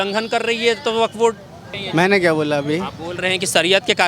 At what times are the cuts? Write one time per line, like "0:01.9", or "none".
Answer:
0:01.6